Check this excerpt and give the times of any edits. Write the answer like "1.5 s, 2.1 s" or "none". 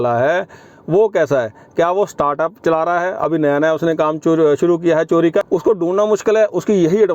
5.5 s